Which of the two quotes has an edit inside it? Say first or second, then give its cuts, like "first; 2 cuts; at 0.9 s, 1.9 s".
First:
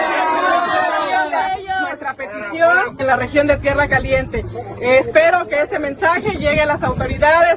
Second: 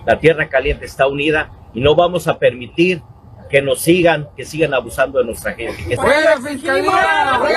second; 1 cut; at 6.0 s